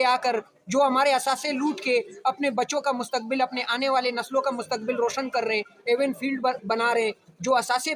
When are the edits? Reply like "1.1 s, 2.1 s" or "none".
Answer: none